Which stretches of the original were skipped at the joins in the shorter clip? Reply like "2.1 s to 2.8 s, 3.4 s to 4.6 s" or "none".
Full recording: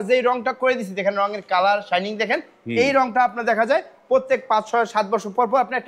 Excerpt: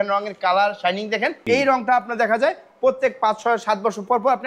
2.5 s to 2.7 s